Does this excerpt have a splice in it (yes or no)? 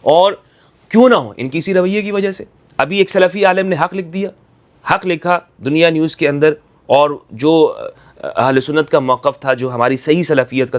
no